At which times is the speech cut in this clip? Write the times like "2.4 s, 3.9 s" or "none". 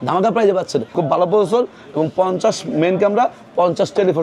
0.9 s

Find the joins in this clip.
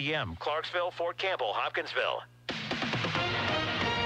2.4 s

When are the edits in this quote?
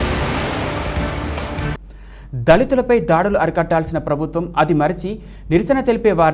1.7 s

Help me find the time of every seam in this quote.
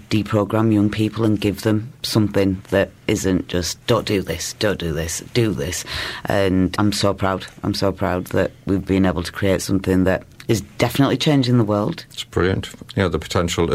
none

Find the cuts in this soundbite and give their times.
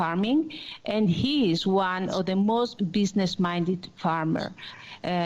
2.7 s

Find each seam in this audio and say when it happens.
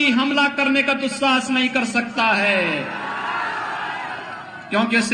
none

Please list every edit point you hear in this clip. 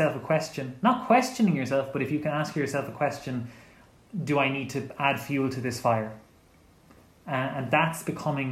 none

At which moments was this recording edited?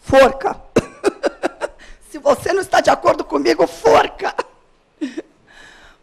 3.2 s

